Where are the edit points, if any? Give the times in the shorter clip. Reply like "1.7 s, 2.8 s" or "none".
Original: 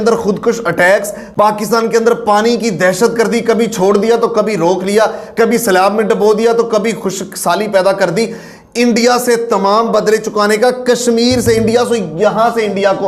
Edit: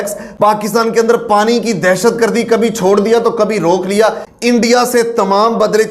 4.2 s

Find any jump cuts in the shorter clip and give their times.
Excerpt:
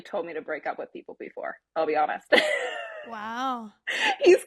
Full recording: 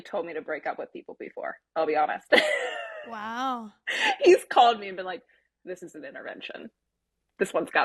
none

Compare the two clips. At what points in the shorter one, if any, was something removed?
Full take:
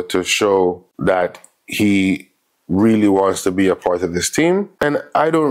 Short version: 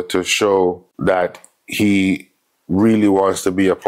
none

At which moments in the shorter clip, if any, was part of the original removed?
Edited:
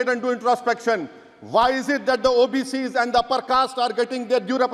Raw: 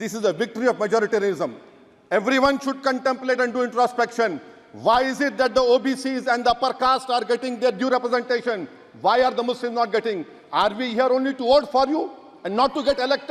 none

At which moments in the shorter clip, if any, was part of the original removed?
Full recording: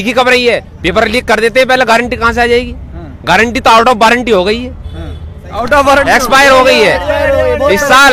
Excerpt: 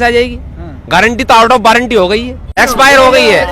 2.6 s

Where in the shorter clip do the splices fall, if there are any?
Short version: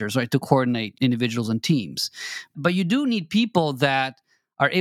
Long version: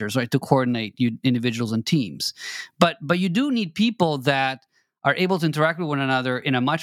0.9 s, 2.5 s

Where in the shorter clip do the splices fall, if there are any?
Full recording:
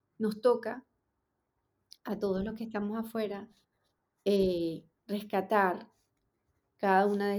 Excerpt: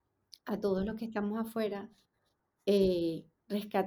none

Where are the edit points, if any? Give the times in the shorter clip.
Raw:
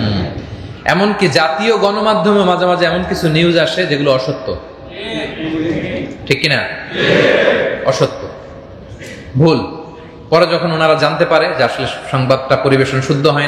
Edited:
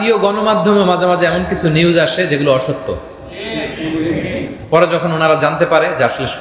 4.5 s

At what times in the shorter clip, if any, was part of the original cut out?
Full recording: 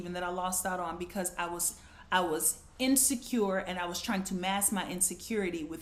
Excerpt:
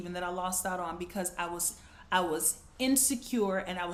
none

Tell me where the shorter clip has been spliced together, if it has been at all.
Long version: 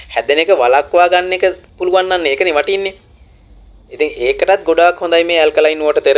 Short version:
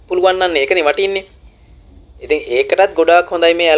none

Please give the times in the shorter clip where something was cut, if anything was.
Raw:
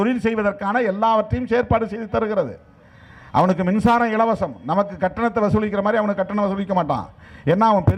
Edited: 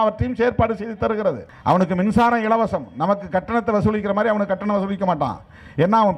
1.5 s

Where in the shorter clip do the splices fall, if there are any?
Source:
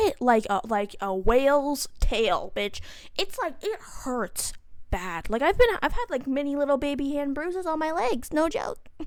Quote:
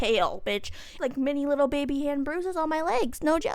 0.9 s

